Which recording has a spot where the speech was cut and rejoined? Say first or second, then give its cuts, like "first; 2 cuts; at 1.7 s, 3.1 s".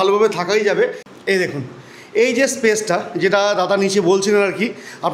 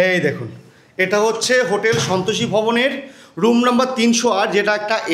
first; 1 cut; at 1.1 s